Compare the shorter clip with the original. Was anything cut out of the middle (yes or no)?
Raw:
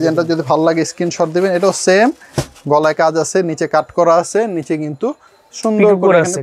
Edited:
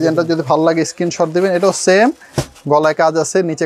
no